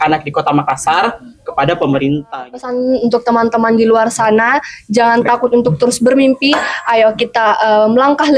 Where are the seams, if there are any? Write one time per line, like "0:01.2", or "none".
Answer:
0:02.6